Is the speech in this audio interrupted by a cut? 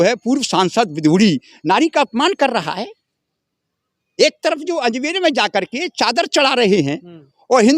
no; 0 cuts

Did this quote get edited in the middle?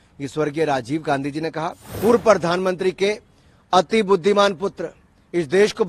yes; 1 cut; at 1.8 s

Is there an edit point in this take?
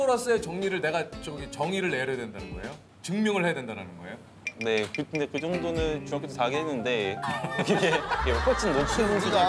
no; 0 cuts

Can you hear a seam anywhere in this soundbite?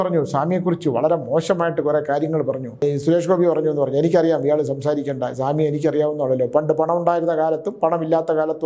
yes; 1 cut; at 2.8 s

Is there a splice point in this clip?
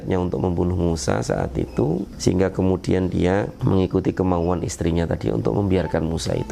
yes; 2 cuts; at 2.1 s, 3.5 s

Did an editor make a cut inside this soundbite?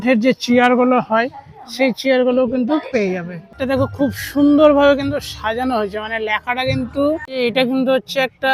yes; 2 cuts; at 3.5 s, 7.3 s

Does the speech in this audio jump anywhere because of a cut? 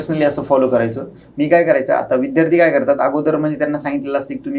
no; 0 cuts

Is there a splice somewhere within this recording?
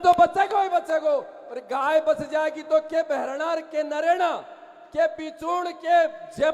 no; 0 cuts

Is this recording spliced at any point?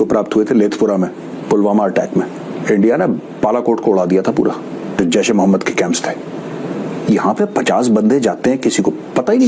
yes; 2 cuts; at 2.5 s, 4.9 s

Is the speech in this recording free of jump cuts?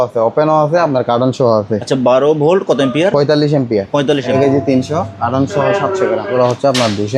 no; 2 cuts; at 4.3 s, 6.3 s

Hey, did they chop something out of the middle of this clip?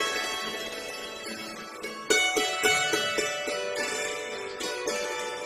yes; 1 cut; at 1.1 s

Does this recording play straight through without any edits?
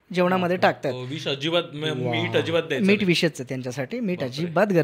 yes; 0 cuts

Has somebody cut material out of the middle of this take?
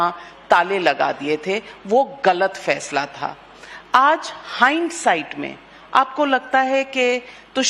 no; 0 cuts

